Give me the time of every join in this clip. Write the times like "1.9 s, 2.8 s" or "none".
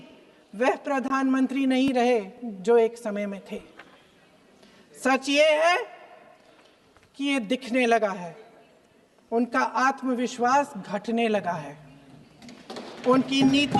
none

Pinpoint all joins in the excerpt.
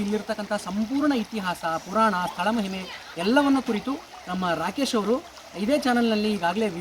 none

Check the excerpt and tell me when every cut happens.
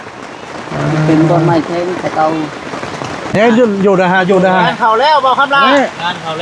3.2 s

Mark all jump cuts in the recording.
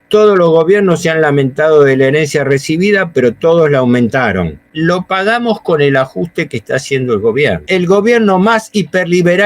4.7 s, 7.6 s

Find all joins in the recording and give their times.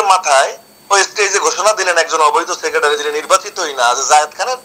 none

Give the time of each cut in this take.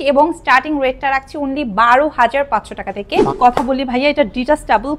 3.3 s

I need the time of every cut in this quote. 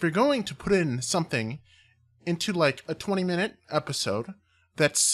1.3 s

